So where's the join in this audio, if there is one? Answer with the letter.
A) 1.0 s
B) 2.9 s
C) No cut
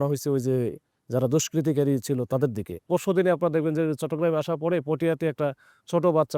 B